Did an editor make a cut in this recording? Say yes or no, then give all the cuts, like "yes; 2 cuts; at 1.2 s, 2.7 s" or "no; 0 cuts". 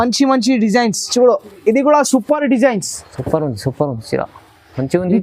no; 0 cuts